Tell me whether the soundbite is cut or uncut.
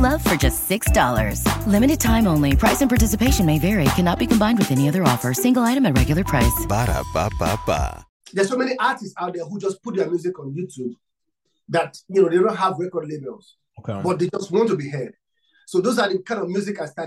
cut